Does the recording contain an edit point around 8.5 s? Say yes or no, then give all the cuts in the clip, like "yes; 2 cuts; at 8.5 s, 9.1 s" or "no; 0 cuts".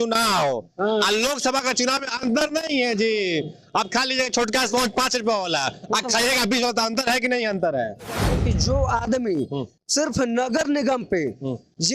yes; 1 cut; at 8.5 s